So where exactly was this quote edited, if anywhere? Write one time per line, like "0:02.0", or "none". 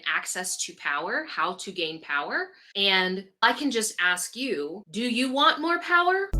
0:02.6
0:03.4
0:04.8